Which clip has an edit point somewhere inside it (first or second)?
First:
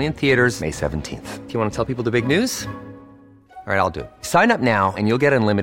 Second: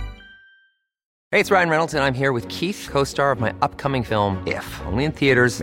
second